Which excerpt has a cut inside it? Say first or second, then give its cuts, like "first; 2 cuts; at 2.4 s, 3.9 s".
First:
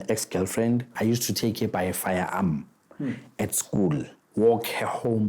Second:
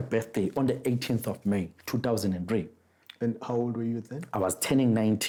first; 2 cuts; at 0.9 s, 4.2 s